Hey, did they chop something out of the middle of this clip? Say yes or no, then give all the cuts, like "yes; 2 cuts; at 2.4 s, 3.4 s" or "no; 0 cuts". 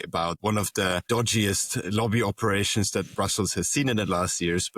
yes; 1 cut; at 1.0 s